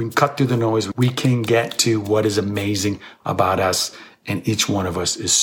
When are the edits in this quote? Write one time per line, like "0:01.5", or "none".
0:00.9